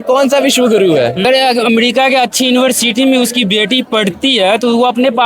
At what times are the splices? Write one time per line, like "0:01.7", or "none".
0:01.2